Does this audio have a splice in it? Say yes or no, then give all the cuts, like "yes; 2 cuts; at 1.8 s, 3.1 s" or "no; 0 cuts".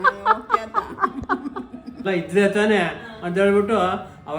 yes; 1 cut; at 2.0 s